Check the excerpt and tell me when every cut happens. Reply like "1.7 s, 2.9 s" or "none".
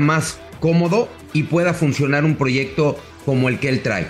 1.2 s, 3.1 s